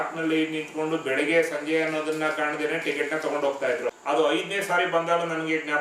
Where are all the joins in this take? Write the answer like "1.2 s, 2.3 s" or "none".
4.0 s